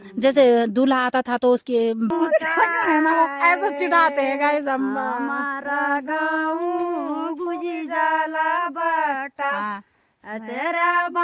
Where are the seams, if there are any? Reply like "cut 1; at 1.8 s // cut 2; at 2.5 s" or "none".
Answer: cut 1; at 2.1 s